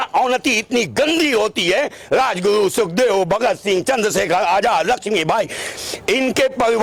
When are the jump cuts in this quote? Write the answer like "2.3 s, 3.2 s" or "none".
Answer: none